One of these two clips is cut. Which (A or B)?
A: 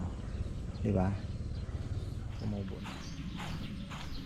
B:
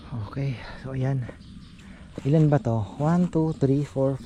A